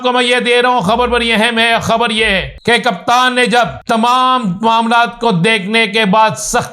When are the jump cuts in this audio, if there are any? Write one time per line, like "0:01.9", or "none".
0:02.5
0:03.8